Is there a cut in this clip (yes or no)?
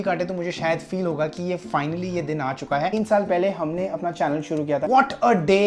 yes